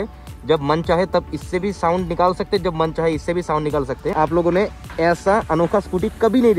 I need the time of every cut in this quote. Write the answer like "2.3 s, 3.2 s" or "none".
4.1 s